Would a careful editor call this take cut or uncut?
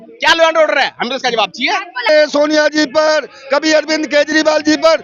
cut